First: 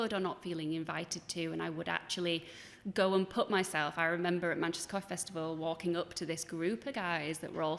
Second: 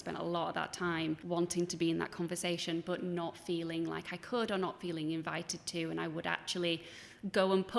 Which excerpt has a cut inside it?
second; 1 cut; at 1.2 s

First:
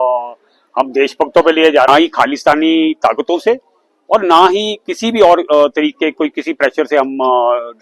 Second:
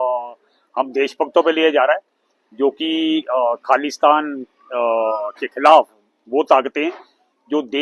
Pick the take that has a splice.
first; 1 cut; at 1.9 s

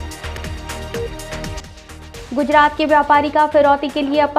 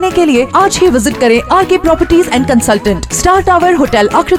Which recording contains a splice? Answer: first; 1 cut; at 1.6 s

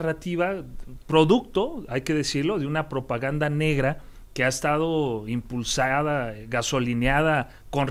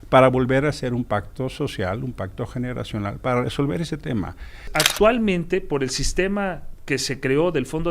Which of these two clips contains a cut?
second; 1 cut; at 4.7 s

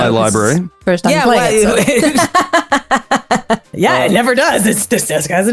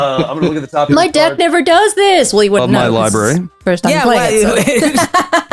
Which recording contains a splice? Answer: first; 1 cut; at 3.7 s

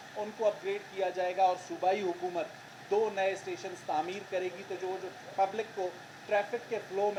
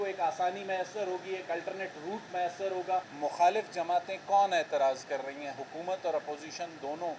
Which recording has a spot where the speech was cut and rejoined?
second; 1 cut; at 3.1 s

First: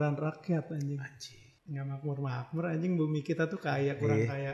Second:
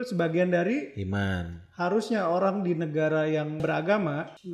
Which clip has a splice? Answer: second; 1 cut; at 3.6 s

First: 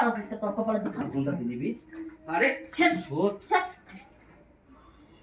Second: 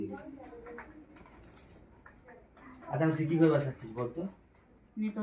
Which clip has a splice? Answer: first; 1 cut; at 1.0 s

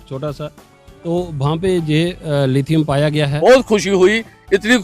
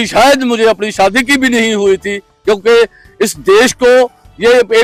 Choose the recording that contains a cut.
first; 1 cut; at 3.4 s

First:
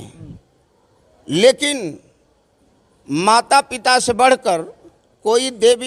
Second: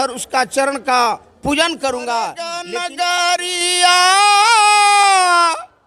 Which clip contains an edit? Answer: second; 1 cut; at 2.7 s

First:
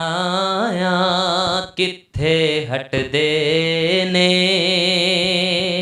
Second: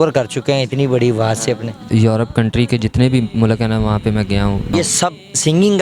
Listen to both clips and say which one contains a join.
second; 2 cuts; at 1.8 s, 4.7 s

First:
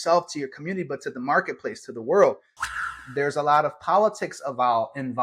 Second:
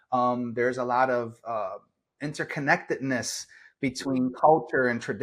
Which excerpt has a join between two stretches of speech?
first; 1 cut; at 3.0 s

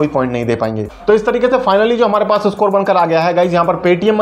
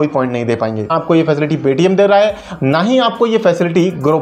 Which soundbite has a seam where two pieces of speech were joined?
second; 1 cut; at 1.0 s

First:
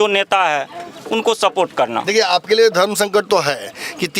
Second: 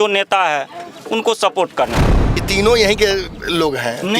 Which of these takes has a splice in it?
second; 1 cut; at 2.0 s

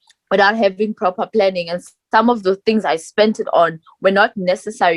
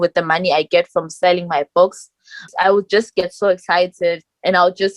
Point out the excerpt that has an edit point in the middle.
second; 1 cut; at 2.5 s

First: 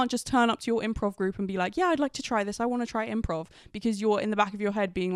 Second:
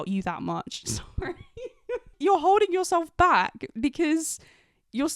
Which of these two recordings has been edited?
second; 1 cut; at 2.1 s

